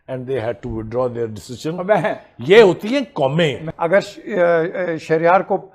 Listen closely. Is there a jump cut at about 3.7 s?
yes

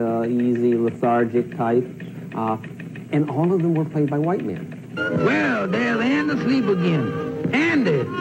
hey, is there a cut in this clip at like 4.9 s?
yes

